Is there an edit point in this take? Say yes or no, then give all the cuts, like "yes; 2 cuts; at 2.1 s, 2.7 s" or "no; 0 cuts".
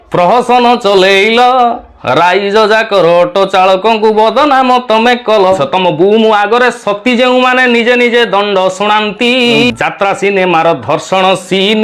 yes; 2 cuts; at 5.6 s, 9.7 s